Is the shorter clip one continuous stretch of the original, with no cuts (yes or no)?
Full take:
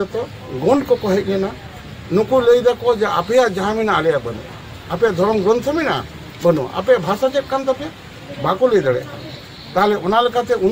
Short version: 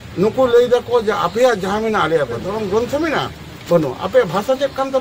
no